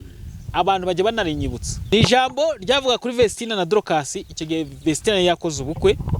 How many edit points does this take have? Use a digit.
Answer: 1